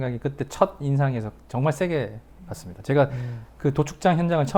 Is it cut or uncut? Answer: uncut